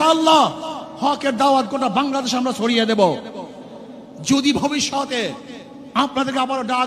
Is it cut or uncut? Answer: uncut